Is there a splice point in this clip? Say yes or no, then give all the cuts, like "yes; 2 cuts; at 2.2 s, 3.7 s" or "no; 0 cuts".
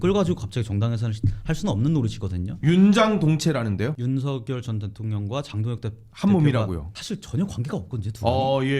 yes; 2 cuts; at 4.0 s, 6.9 s